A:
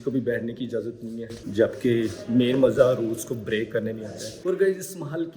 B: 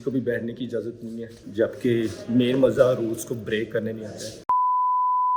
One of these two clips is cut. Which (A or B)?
A